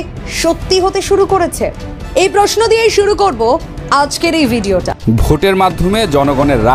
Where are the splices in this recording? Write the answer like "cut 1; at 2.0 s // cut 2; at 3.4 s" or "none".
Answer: cut 1; at 4.9 s